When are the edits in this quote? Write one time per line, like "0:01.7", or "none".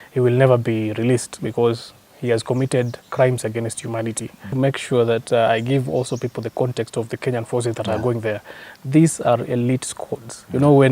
0:04.5